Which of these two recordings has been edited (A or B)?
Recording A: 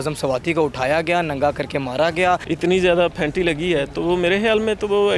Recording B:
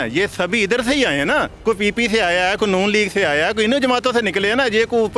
A